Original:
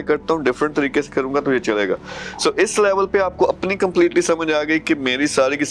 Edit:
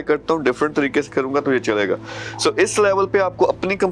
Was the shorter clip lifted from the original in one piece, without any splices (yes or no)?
yes